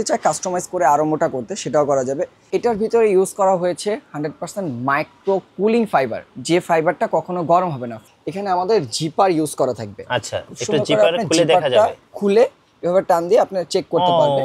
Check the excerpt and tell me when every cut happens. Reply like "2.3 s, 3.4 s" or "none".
2.5 s, 7.9 s